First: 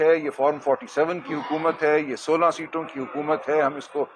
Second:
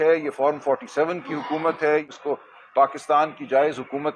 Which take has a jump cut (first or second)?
second